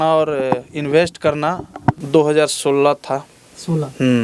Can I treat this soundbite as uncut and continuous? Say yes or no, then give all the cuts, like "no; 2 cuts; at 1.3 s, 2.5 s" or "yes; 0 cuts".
no; 1 cut; at 2.0 s